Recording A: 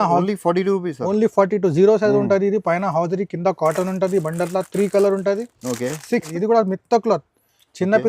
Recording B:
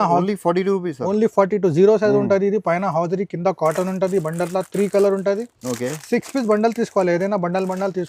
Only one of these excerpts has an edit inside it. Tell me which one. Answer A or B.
A